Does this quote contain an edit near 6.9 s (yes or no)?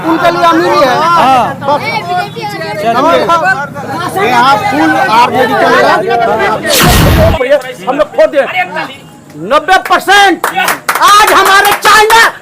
yes